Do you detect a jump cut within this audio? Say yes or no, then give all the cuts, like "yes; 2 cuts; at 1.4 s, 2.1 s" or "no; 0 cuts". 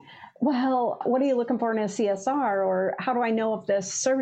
yes; 1 cut; at 1.0 s